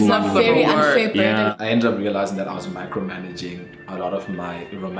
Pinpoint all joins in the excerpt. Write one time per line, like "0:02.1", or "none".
0:01.5
0:03.7